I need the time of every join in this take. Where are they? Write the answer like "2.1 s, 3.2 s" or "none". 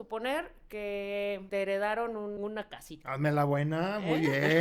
1.4 s, 2.4 s